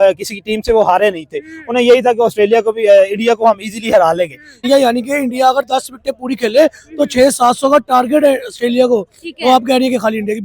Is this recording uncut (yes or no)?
no